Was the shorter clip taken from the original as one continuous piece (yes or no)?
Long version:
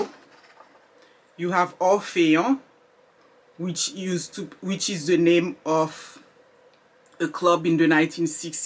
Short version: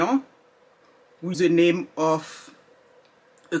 no